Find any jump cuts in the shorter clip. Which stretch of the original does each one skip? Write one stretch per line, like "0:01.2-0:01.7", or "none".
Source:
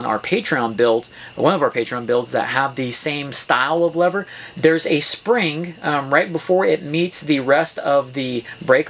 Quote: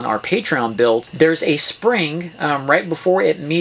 0:01.1-0:04.5